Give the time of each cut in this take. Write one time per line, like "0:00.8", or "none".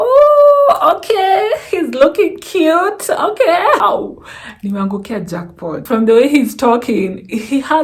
0:03.8
0:05.8